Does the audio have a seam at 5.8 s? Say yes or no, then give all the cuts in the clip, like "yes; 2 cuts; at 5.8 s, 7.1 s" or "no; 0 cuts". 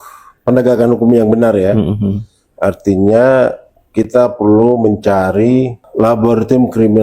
yes; 1 cut; at 5.8 s